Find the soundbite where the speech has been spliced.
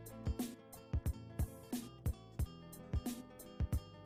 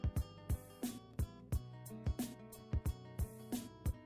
second; 1 cut; at 1.1 s

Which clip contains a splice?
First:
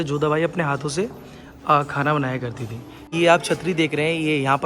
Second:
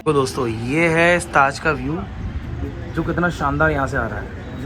first; 1 cut; at 3.1 s

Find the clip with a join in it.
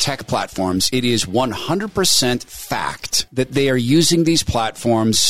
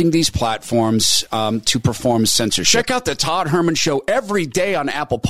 second; 1 cut; at 2.6 s

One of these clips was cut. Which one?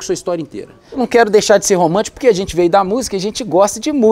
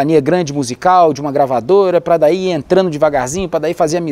first; 1 cut; at 1.0 s

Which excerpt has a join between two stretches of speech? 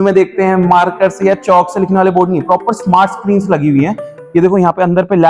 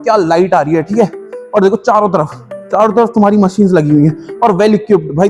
first; 1 cut; at 4.2 s

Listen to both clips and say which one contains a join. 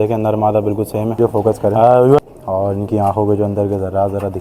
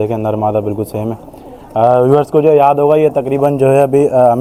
first; 1 cut; at 2.2 s

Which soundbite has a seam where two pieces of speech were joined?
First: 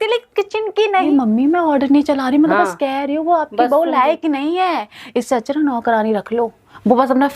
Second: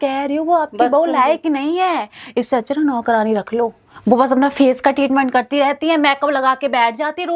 first; 1 cut; at 1.1 s

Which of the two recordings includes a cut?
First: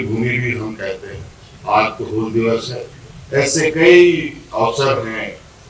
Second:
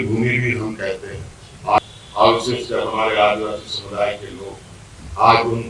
second; 1 cut; at 1.8 s

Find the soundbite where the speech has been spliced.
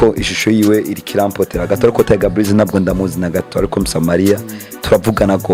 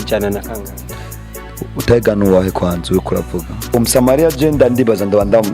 second; 1 cut; at 3.8 s

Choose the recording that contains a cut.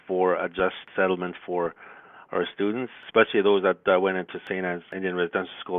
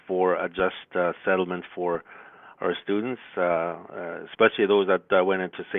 first; 3 cuts; at 0.9 s, 3.0 s, 4.5 s

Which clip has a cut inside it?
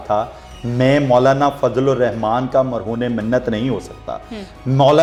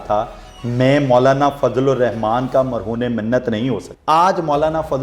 second; 1 cut; at 3.9 s

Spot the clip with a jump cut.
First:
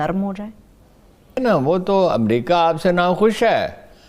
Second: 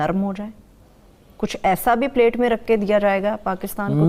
first; 1 cut; at 1.4 s

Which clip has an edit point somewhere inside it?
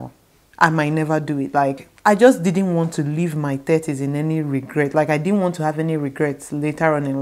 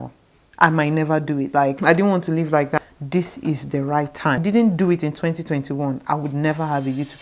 second; 3 cuts; at 1.8 s, 2.8 s, 4.4 s

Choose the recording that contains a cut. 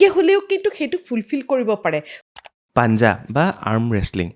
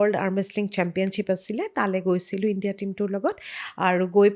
first; 1 cut; at 2.2 s

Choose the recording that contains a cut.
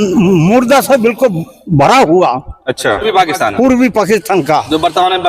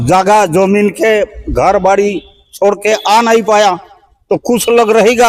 first; 1 cut; at 3.1 s

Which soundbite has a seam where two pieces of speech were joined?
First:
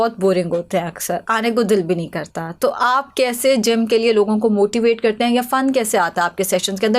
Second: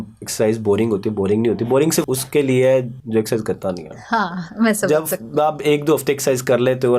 second; 2 cuts; at 2.1 s, 3.0 s

